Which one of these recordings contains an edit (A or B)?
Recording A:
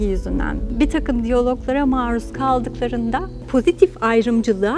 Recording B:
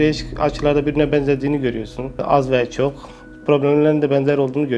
A